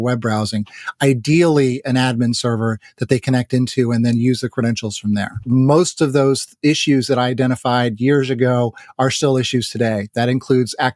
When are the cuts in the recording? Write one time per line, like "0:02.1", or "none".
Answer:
0:05.5